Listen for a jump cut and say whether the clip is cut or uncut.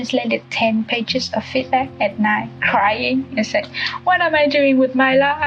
uncut